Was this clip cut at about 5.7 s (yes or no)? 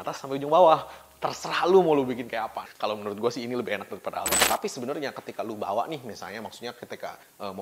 no